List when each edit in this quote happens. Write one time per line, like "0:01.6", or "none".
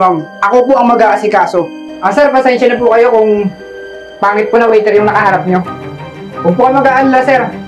0:01.8